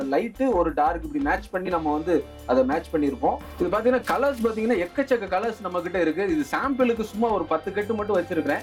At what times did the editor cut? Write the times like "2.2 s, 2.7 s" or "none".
3.5 s